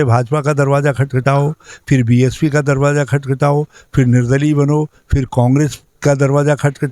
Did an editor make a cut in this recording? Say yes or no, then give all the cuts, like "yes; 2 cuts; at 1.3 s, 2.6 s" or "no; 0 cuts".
no; 0 cuts